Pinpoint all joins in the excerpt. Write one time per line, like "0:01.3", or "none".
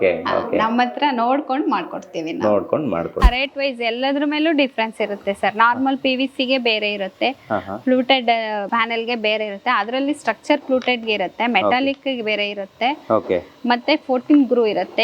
0:03.2
0:08.7